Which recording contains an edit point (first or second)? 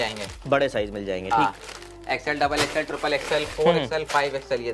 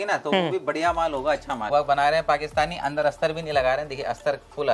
second